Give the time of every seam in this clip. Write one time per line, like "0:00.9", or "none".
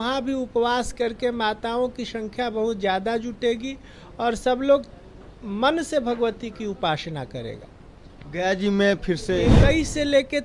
0:09.5